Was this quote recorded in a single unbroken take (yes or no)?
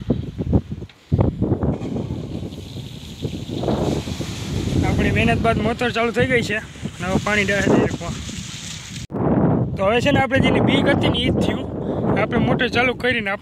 yes